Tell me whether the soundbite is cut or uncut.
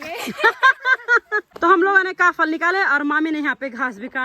cut